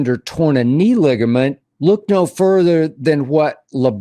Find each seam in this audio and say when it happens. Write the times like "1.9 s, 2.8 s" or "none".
1.7 s